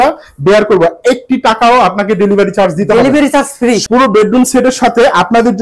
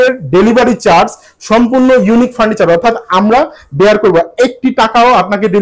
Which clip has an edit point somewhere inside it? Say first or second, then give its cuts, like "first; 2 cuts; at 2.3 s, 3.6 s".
first; 1 cut; at 3.8 s